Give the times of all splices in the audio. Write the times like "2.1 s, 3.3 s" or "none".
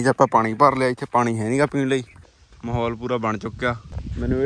2.2 s

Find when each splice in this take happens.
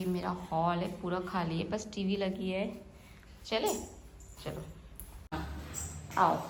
none

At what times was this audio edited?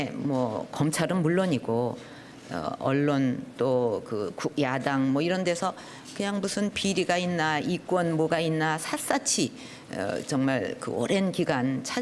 none

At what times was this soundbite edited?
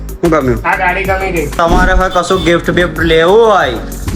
1.5 s

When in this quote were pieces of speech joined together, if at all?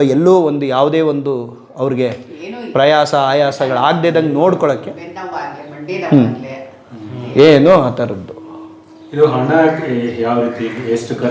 none

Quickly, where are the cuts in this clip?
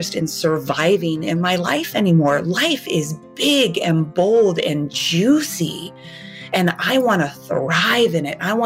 none

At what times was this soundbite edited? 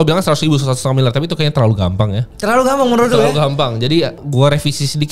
4.2 s

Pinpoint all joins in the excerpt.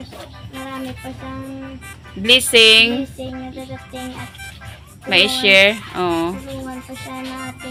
none

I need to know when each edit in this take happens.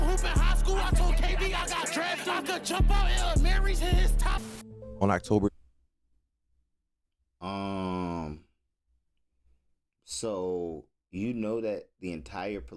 none

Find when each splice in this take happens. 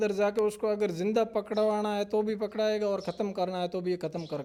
none

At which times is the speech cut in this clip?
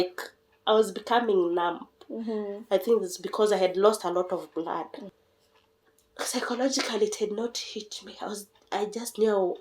5.0 s

